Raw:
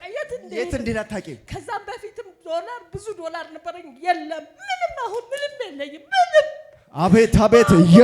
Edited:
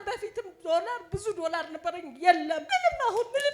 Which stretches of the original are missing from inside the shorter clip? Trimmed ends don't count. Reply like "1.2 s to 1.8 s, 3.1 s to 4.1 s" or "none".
4.4 s to 4.6 s